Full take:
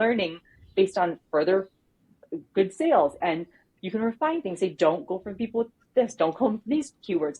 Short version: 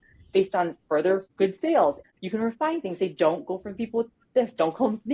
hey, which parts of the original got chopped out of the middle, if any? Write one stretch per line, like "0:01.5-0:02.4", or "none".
0:01.7-0:02.5
0:03.2-0:03.6